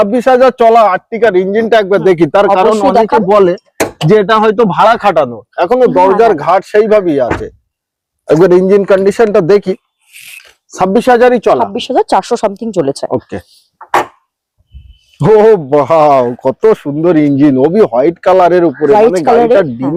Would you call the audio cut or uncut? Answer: uncut